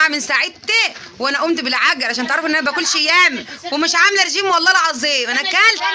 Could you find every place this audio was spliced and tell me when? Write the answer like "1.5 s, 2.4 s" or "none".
none